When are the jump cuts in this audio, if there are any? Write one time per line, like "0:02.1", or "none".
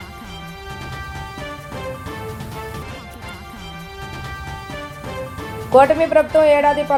none